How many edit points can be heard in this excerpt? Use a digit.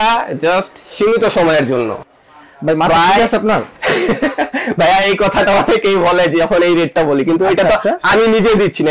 2